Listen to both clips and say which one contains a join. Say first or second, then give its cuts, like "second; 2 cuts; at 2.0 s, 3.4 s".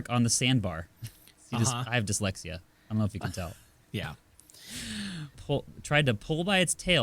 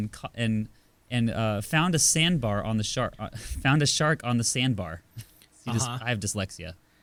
first; 1 cut; at 5.3 s